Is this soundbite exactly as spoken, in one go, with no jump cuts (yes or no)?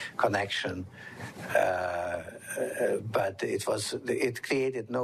yes